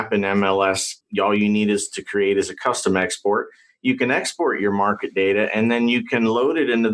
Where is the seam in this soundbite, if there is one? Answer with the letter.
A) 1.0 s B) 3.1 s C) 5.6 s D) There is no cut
A